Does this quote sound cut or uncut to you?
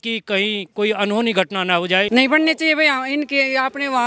cut